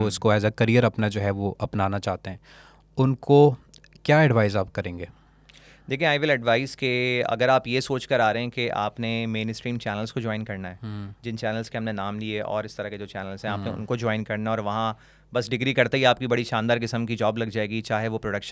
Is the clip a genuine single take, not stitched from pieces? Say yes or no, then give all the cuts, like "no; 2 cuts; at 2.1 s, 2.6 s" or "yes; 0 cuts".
yes; 0 cuts